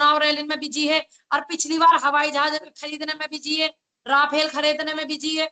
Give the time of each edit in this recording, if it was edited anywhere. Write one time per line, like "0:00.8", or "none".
none